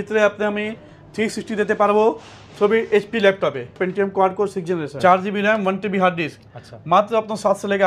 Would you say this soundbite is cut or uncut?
cut